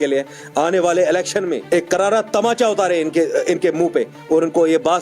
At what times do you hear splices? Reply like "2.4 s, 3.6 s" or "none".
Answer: 1.6 s